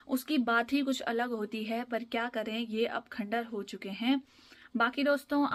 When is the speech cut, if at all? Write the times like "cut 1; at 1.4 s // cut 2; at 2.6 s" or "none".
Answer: none